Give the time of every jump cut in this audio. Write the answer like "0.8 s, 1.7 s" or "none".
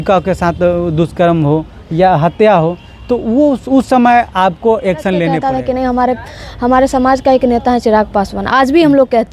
5.4 s